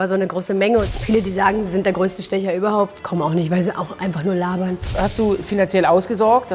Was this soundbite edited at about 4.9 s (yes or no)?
yes